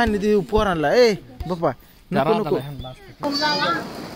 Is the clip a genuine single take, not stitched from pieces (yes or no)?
no